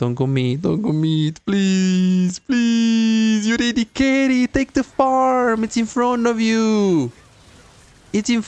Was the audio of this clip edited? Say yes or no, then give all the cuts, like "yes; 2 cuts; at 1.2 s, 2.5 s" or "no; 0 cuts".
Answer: no; 0 cuts